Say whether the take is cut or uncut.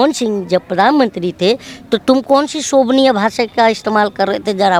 uncut